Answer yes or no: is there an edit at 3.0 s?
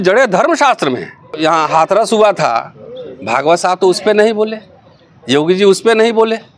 no